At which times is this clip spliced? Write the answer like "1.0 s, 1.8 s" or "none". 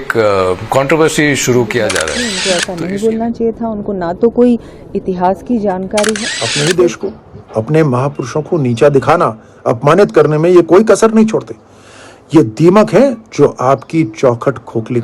2.3 s, 6.4 s